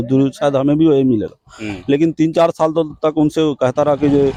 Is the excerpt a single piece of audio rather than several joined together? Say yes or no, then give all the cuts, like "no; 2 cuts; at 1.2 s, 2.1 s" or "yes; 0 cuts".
yes; 0 cuts